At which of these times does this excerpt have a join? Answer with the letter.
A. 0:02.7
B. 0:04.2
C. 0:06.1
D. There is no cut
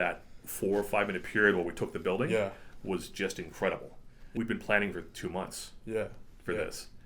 B